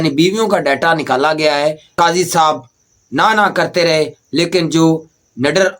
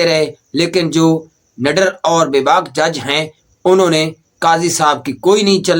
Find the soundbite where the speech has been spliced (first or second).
first